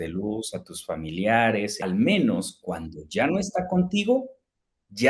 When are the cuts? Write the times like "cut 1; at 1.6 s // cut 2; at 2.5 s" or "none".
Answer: cut 1; at 1.8 s